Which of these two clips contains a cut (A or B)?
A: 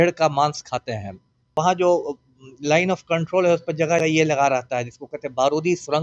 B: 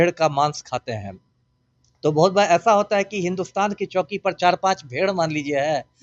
A